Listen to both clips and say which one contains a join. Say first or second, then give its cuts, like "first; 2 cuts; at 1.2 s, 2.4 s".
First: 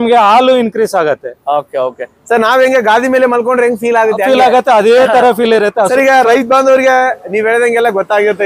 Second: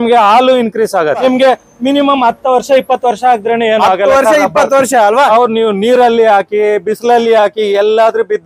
second; 1 cut; at 1.2 s